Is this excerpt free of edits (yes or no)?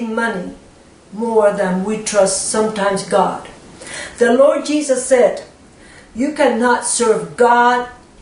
no